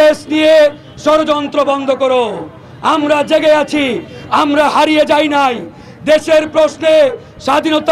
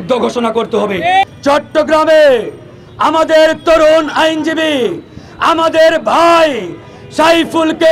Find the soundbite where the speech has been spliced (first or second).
second